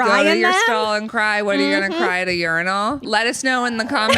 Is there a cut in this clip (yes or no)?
yes